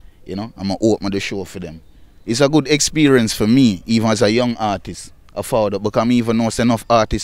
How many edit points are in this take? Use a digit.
1